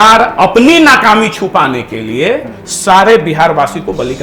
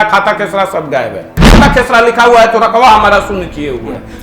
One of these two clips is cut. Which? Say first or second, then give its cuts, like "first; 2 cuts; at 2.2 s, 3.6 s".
second; 1 cut; at 1.6 s